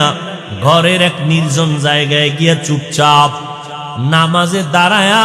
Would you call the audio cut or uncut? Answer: uncut